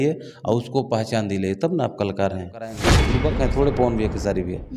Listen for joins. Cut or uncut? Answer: cut